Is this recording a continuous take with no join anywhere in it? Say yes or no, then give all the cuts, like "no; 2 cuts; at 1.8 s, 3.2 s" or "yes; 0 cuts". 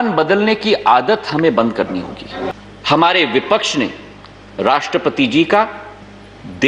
no; 1 cut; at 2.5 s